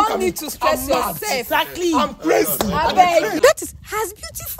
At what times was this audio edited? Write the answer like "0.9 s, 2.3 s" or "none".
3.3 s